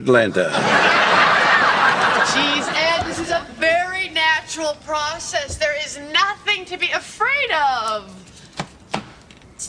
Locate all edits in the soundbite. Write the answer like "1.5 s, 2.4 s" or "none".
7.6 s